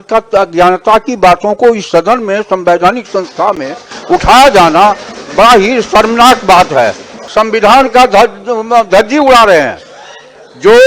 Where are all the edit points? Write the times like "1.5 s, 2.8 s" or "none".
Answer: 7.2 s